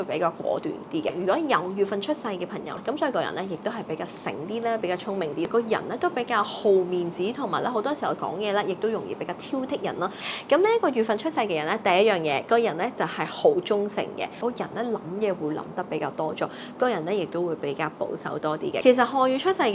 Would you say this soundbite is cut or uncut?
cut